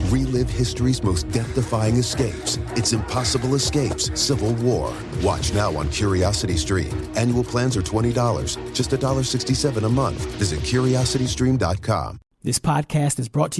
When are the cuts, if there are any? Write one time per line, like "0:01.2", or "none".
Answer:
0:12.3